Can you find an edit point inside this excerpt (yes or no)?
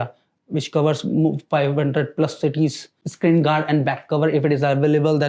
yes